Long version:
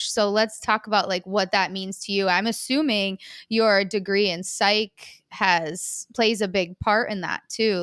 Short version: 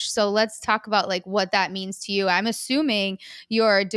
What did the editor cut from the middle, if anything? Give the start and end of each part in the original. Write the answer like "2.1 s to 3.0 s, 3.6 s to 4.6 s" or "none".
none